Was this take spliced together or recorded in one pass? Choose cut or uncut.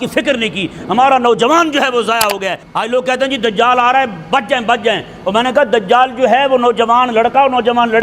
cut